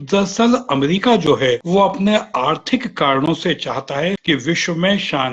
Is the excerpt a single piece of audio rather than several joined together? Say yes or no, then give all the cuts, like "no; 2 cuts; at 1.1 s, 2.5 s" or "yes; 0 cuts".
no; 2 cuts; at 1.6 s, 4.2 s